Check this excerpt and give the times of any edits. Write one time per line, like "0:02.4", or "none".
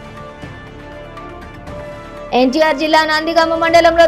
none